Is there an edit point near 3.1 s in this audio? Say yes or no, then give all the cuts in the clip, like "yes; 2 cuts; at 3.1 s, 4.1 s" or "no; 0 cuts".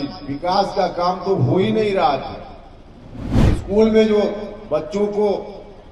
yes; 1 cut; at 3.1 s